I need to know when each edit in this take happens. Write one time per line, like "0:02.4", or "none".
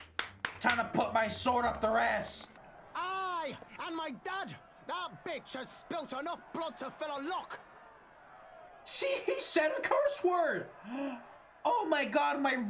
0:02.6